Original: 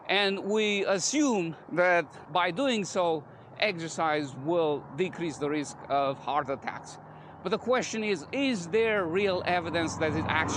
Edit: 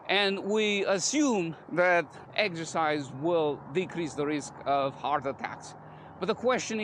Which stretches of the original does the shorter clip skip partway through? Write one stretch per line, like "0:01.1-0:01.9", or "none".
0:02.2-0:03.4

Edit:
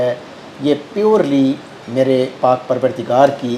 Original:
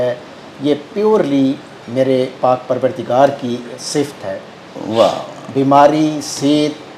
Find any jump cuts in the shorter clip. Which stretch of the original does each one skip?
none

